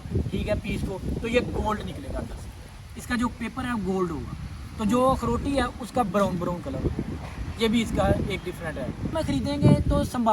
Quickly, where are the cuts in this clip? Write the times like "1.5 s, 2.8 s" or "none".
9.1 s